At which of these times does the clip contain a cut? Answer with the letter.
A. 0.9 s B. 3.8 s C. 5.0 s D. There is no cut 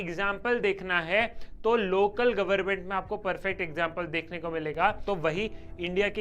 C